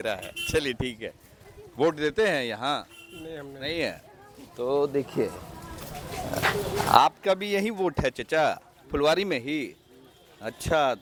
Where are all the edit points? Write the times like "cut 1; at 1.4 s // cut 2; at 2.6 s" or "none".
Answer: none